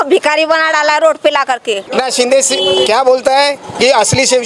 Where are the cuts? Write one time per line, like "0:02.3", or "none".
0:01.9